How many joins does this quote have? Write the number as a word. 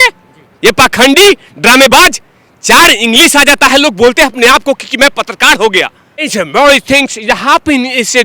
one